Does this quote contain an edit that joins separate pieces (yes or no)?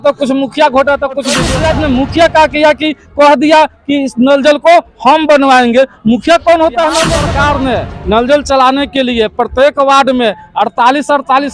yes